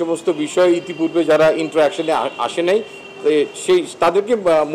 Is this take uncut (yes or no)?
yes